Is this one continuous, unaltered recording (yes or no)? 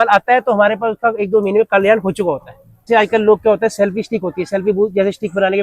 no